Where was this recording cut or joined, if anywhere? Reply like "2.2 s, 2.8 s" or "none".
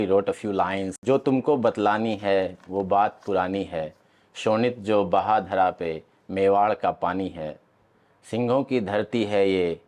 1.0 s